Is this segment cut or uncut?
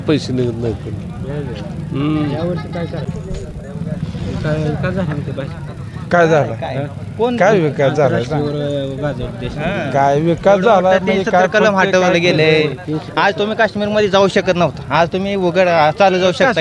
cut